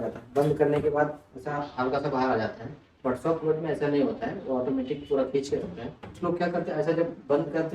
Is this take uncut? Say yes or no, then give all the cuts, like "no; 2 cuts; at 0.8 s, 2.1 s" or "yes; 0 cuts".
no; 1 cut; at 6.2 s